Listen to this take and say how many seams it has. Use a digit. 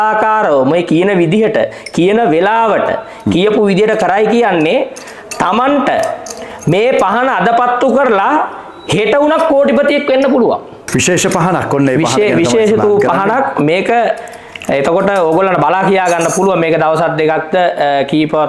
1